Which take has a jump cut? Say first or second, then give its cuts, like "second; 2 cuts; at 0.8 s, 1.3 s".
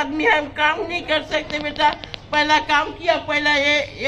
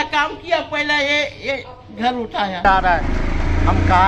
second; 1 cut; at 2.6 s